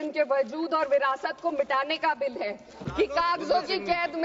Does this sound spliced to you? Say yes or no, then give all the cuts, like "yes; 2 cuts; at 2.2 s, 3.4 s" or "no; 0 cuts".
yes; 1 cut; at 2.8 s